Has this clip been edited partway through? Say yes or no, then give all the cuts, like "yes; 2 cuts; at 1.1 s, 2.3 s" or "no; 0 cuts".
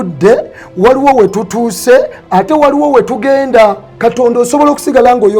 yes; 1 cut; at 3.9 s